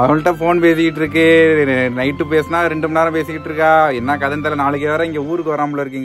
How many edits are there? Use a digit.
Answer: 0